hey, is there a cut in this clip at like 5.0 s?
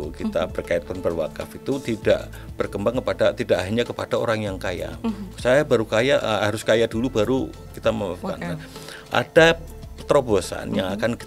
no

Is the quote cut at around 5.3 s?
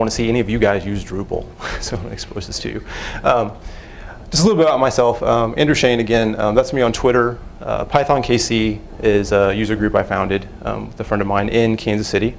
no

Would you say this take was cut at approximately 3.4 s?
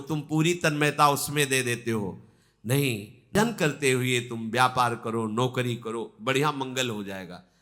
yes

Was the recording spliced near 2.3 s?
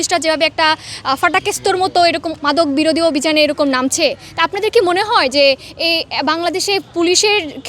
yes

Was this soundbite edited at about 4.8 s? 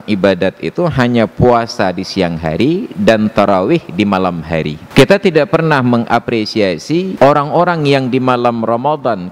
yes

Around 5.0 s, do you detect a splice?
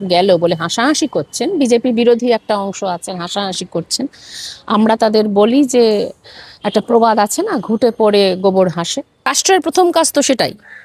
no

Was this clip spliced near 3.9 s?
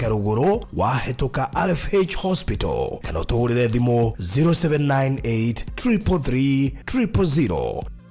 no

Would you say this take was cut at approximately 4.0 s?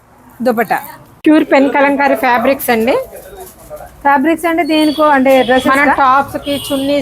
no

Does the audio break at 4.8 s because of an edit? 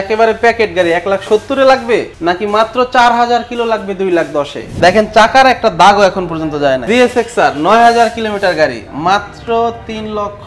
yes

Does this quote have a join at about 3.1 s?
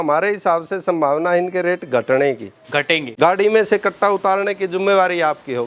yes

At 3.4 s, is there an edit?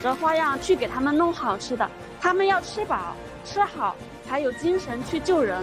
no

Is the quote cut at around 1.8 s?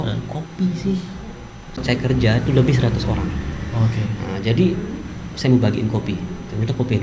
yes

